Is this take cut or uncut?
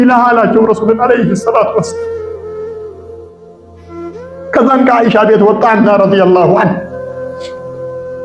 cut